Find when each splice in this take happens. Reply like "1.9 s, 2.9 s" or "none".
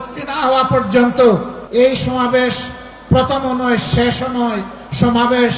1.6 s